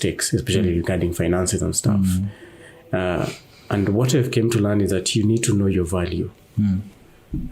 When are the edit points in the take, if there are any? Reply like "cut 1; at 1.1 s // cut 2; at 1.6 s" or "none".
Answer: none